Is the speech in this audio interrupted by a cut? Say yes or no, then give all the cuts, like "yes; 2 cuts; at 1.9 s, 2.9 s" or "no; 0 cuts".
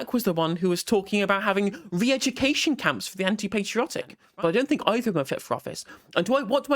yes; 1 cut; at 4.2 s